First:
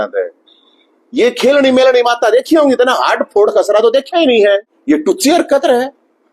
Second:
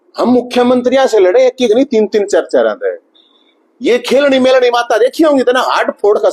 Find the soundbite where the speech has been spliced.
first; 1 cut; at 4.7 s

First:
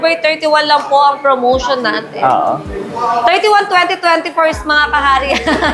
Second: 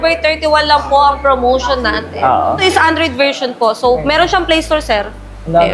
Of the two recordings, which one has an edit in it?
second; 1 cut; at 2.6 s

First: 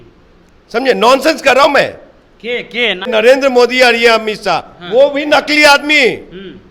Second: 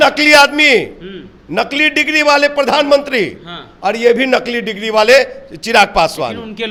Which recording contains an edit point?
first; 1 cut; at 3.1 s

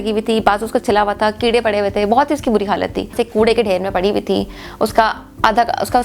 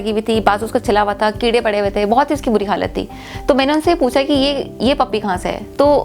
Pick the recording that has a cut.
first; 1 cut; at 3.1 s

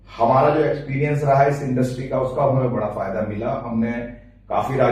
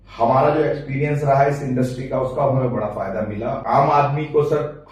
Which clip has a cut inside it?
second; 1 cut; at 3.6 s

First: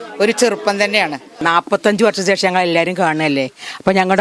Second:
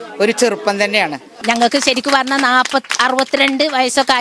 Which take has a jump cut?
second; 1 cut; at 1.4 s

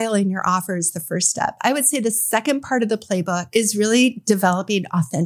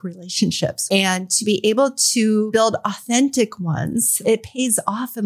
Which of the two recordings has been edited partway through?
second; 3 cuts; at 0.8 s, 2.6 s, 4.2 s

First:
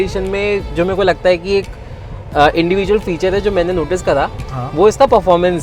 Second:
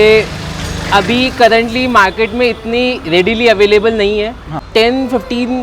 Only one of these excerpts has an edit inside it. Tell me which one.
second; 1 cut; at 4.5 s

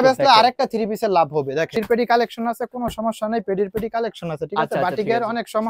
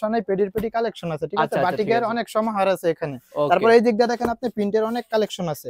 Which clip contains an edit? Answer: first; 1 cut; at 1.7 s

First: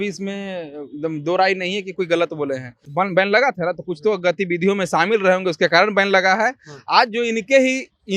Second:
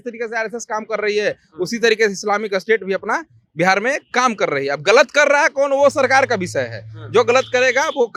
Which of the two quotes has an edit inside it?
first; 1 cut; at 2.8 s

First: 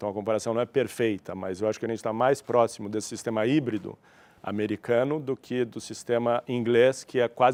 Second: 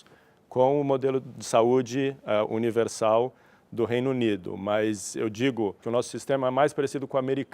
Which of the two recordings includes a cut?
second; 1 cut; at 5.8 s

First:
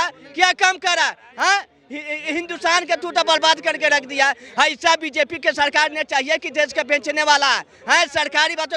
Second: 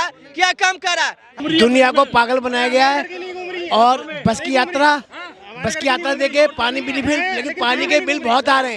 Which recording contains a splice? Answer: second; 1 cut; at 1.3 s

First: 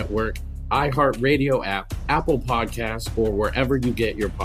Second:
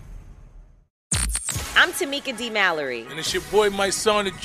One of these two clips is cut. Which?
second; 1 cut; at 1.0 s

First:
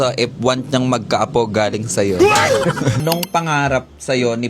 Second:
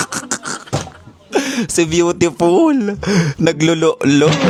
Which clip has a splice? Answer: first; 1 cut; at 3.0 s

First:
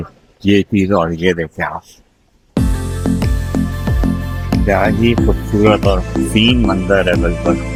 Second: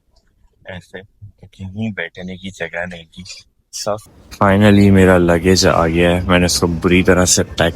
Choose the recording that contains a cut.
second; 1 cut; at 4.1 s

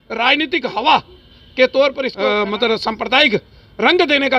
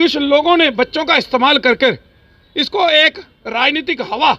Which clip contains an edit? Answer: first; 1 cut; at 2.1 s

